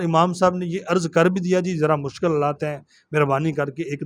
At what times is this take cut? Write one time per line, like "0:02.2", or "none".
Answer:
none